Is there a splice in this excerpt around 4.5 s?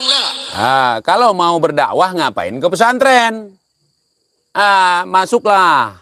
no; 0 cuts

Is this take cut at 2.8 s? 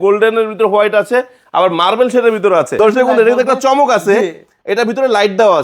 yes; 1 cut; at 2.8 s

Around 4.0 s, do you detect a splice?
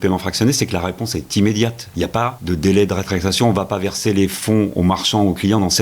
no; 1 cut; at 2.1 s

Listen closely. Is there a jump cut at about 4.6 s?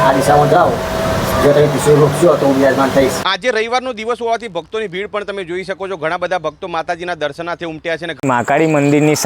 no; 2 cuts; at 3.2 s, 8.1 s

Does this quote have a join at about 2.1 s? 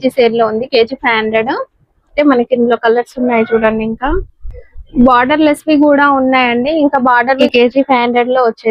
yes; 2 cuts; at 2.1 s, 7.4 s

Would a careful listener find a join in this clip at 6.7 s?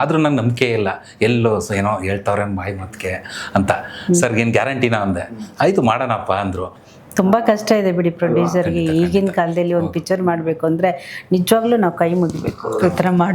yes; 1 cut; at 6.7 s

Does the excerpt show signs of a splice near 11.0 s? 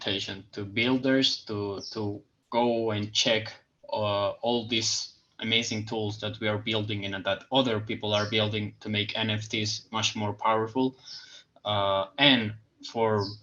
no; 0 cuts

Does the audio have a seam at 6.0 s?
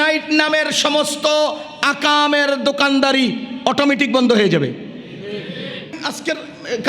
yes; 1 cut; at 6.0 s

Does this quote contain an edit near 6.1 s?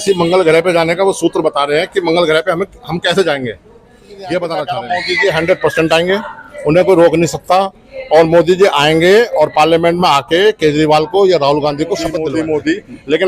no; 2 cuts; at 4.8 s, 12.2 s

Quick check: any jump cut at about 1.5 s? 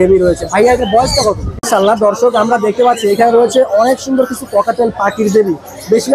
yes; 1 cut; at 1.5 s

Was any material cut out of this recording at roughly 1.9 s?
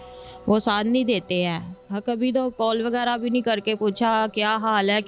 yes; 1 cut; at 1.9 s

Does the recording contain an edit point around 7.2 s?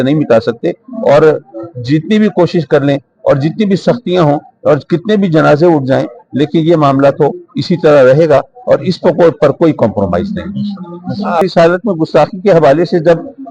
no; 1 cut; at 11.4 s

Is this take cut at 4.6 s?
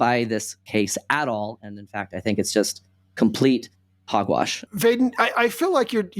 yes; 1 cut; at 4.6 s

